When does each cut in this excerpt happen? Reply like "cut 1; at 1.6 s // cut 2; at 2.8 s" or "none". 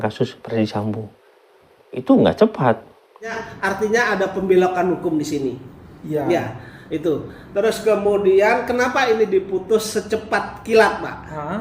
cut 1; at 3.4 s